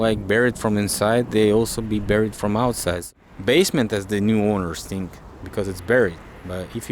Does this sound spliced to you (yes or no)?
yes